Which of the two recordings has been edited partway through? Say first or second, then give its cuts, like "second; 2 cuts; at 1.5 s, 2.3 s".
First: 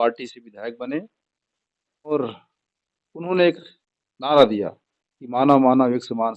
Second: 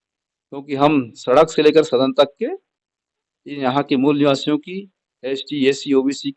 first; 1 cut; at 2.1 s